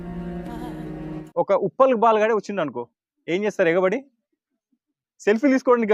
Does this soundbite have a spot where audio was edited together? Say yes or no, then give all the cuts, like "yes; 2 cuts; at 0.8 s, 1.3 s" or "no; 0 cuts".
yes; 1 cut; at 1.2 s